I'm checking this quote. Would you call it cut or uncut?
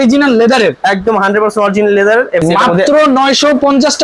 cut